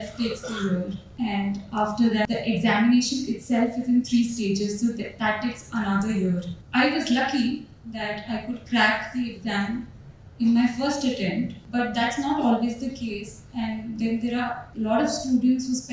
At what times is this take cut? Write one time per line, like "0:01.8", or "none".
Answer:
0:01.0
0:02.3
0:06.6
0:11.6
0:14.6